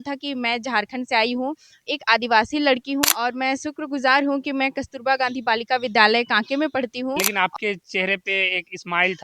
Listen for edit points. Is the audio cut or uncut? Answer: cut